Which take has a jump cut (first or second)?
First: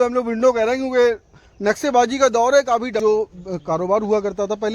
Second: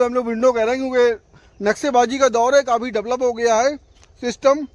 first